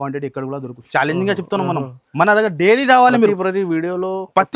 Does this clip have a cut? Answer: no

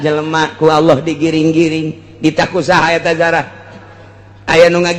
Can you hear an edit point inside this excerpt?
no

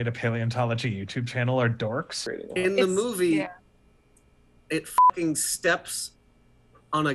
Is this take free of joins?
no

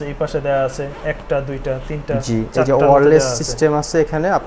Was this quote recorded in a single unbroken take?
yes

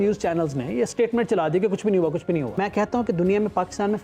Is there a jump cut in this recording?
yes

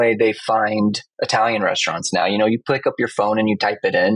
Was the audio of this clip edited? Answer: no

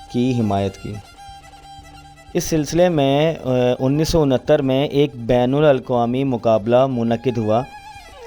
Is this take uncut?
yes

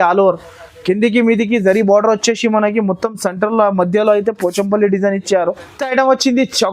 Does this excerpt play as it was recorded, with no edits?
no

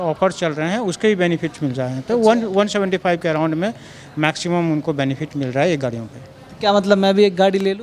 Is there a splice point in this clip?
no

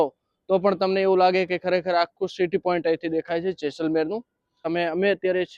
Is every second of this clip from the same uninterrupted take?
no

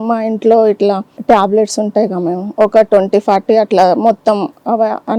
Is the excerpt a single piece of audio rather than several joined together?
no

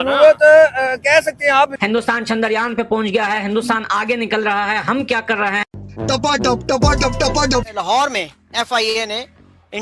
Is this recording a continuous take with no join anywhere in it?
yes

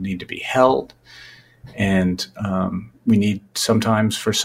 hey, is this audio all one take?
yes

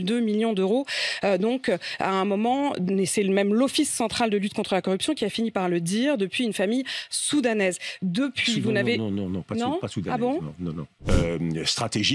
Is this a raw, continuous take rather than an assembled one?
no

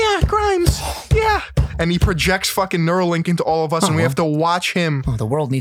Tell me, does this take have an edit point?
no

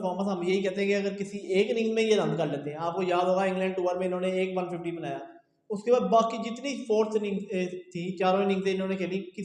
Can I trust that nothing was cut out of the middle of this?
yes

